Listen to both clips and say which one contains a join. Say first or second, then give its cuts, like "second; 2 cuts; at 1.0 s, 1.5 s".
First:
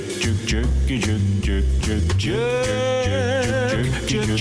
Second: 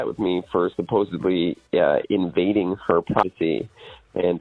second; 1 cut; at 3.2 s